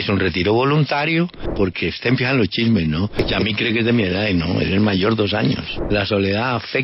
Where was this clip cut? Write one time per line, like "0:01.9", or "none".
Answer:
0:01.4
0:03.2
0:05.7